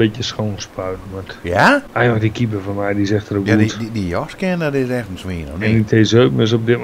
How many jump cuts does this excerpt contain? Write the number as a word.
one